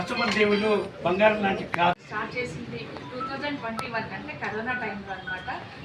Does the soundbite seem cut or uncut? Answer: cut